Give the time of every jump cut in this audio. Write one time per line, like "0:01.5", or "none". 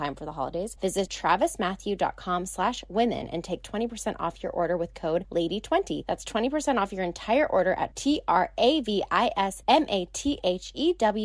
0:01.0
0:05.3
0:06.0
0:09.6